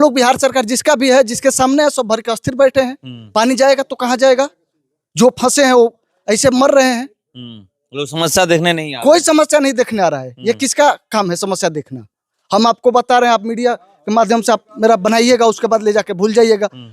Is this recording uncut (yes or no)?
yes